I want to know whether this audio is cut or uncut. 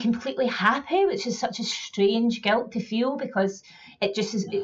uncut